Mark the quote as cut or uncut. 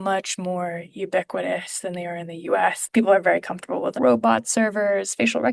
cut